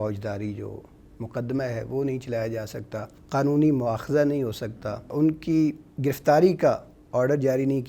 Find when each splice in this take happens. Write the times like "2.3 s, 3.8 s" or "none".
3.2 s, 5.1 s